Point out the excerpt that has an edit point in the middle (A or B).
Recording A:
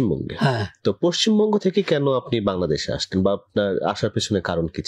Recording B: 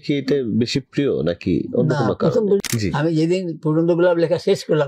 B